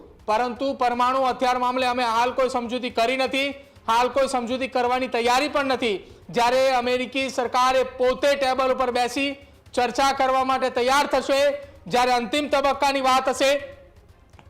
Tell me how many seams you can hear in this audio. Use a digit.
0